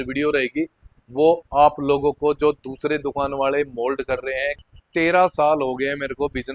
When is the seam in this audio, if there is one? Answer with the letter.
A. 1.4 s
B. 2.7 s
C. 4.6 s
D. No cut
C